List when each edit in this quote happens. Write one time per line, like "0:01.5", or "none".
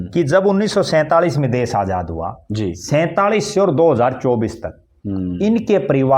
none